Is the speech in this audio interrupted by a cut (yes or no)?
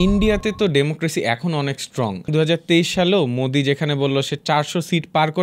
yes